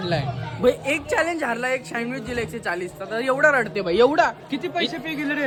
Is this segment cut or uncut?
uncut